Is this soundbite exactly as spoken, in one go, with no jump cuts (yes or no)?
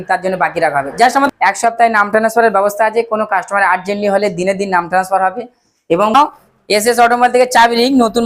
no